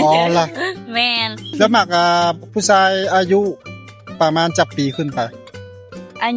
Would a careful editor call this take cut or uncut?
cut